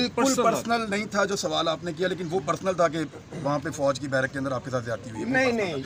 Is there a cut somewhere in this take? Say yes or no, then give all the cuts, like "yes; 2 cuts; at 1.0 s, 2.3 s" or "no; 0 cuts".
no; 0 cuts